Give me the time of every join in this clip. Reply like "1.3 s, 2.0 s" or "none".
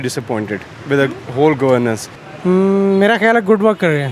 2.1 s